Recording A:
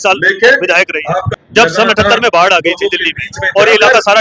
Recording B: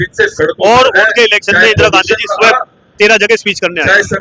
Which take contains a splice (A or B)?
A